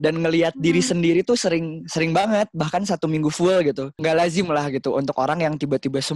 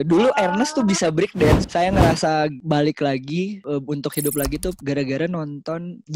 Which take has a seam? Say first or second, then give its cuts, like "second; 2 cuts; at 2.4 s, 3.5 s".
first; 1 cut; at 4.0 s